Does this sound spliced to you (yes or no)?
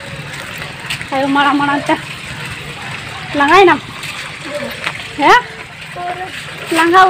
no